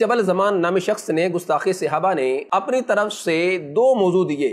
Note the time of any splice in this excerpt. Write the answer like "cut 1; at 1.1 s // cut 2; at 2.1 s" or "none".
none